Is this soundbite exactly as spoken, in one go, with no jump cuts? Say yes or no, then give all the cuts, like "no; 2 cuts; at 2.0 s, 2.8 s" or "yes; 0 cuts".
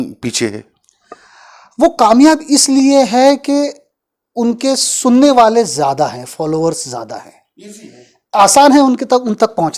yes; 0 cuts